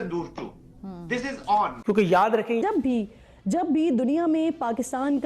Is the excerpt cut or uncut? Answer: cut